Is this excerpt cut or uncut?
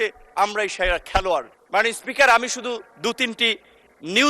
cut